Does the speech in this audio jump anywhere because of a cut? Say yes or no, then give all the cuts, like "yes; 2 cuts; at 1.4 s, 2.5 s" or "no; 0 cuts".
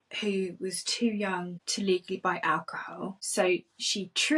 yes; 2 cuts; at 1.6 s, 3.2 s